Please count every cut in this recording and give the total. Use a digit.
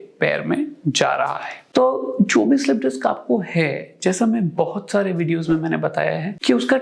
0